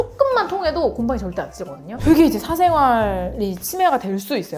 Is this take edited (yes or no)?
yes